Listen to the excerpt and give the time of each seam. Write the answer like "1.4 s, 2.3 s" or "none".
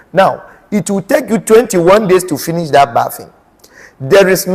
none